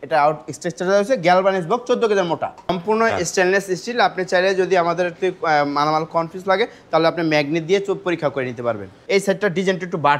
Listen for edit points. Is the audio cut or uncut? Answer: cut